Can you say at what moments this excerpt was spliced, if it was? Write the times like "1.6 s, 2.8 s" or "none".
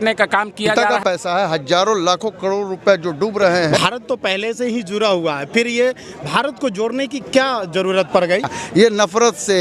0.9 s, 3.7 s, 8.6 s